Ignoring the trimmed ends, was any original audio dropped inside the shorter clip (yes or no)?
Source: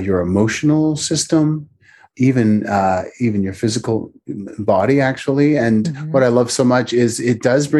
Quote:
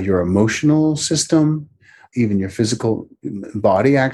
yes